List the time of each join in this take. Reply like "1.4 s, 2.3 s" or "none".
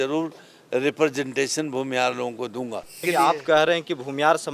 3.0 s